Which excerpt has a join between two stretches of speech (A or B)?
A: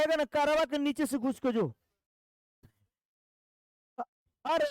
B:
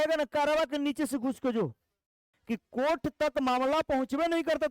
B